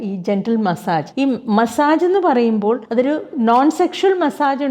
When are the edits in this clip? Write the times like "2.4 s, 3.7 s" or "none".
1.1 s, 2.8 s